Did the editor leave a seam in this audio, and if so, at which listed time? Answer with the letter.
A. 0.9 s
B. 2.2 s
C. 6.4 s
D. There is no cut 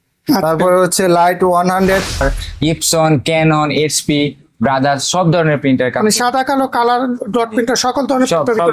B